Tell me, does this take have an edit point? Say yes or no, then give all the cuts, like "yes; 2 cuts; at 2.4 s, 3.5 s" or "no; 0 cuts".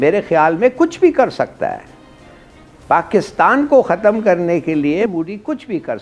yes; 1 cut; at 5.1 s